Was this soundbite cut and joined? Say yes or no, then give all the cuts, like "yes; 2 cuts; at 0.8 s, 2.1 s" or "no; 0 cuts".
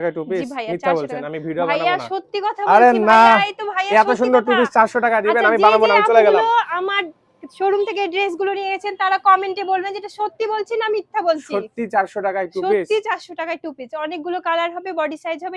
no; 0 cuts